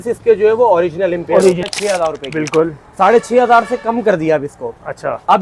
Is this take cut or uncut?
cut